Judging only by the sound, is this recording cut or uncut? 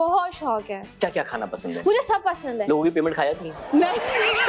uncut